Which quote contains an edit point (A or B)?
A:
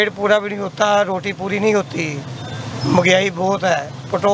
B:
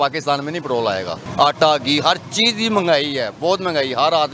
B